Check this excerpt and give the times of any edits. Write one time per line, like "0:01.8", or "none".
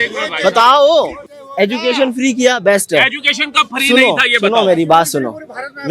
0:01.3